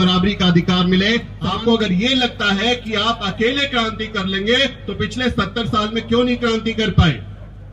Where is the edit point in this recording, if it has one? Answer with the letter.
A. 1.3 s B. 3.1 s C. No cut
A